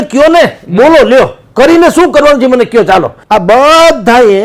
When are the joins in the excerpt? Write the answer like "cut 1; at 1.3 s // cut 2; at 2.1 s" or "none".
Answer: cut 1; at 3.2 s